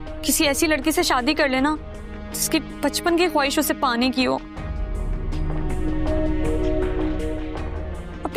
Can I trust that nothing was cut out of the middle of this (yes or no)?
yes